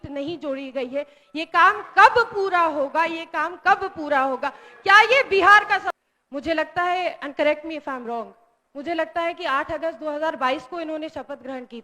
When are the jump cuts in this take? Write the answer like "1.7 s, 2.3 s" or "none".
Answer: 5.9 s